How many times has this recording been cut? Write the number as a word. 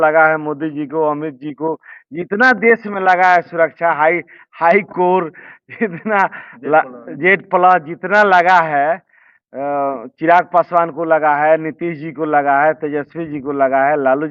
zero